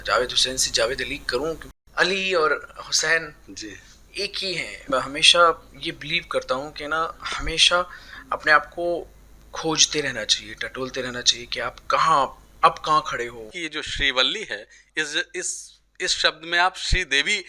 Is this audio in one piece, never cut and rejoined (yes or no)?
no